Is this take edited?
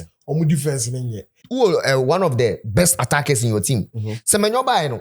yes; 1 cut; at 1.4 s

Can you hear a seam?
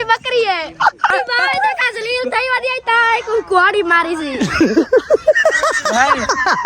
yes; 1 cut; at 1.1 s

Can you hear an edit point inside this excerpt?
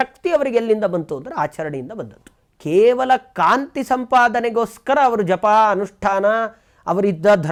no; 0 cuts

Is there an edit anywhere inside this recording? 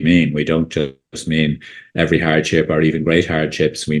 no; 0 cuts

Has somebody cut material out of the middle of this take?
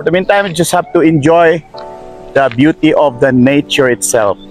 no; 0 cuts

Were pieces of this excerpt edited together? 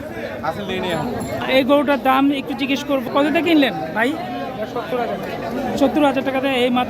yes; 1 cut; at 1.4 s

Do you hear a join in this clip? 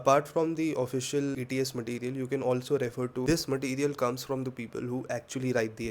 yes; 1 cut; at 3.2 s

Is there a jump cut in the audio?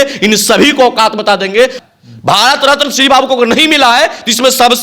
yes; 1 cut; at 1.8 s

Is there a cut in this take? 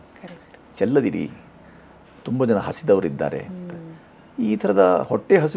no; 0 cuts

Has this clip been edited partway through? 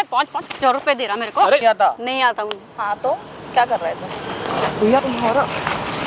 yes; 2 cuts; at 1.6 s, 5.0 s

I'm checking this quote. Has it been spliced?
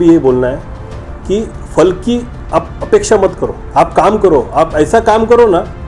yes; 2 cuts; at 2.3 s, 3.5 s

